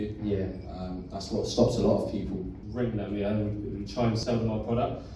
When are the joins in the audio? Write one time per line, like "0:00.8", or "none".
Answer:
0:02.5
0:04.2